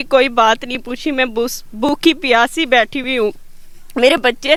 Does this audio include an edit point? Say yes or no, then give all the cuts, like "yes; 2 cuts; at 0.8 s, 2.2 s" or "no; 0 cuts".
no; 0 cuts